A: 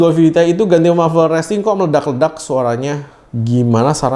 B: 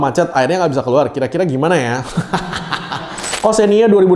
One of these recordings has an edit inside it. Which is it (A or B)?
B